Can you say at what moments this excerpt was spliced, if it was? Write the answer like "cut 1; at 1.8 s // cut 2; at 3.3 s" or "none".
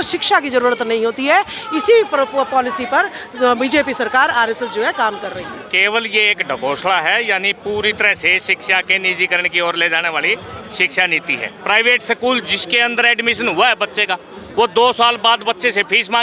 cut 1; at 5.6 s // cut 2; at 11.5 s

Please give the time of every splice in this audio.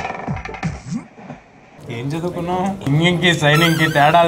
cut 1; at 1.7 s // cut 2; at 2.8 s

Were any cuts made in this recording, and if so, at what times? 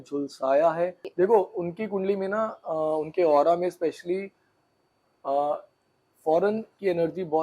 cut 1; at 1.0 s

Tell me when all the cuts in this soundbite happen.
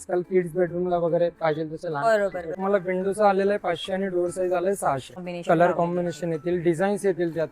cut 1; at 2.5 s // cut 2; at 5.2 s

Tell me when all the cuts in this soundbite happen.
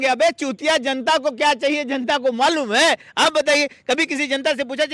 none

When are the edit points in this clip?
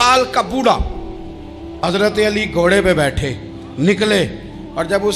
cut 1; at 1.8 s

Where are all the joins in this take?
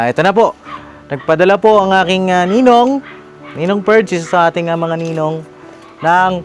none

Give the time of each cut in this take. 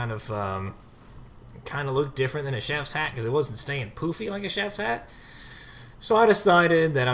cut 1; at 5.5 s

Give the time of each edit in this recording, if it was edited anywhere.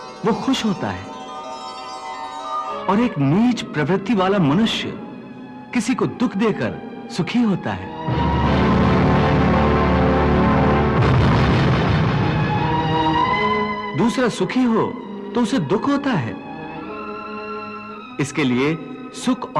cut 1; at 2.8 s

